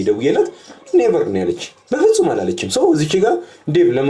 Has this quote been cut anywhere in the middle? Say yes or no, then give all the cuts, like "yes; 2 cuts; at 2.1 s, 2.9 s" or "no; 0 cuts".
no; 0 cuts